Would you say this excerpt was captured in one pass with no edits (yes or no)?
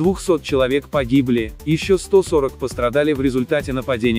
yes